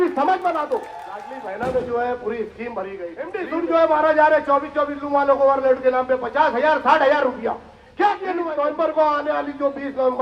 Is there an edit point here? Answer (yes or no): yes